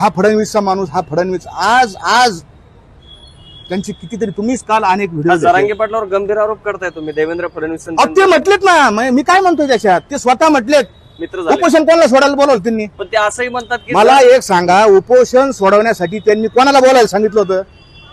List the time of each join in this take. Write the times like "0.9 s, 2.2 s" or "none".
none

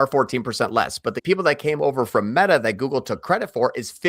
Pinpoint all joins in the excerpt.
1.2 s

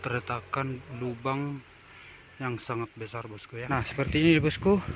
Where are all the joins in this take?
3.6 s

